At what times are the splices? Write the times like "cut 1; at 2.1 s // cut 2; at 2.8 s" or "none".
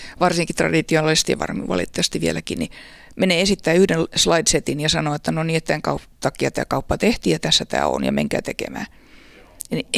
none